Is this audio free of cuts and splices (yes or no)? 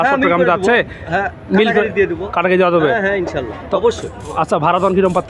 yes